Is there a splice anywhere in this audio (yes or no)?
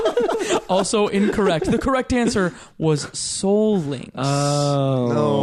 no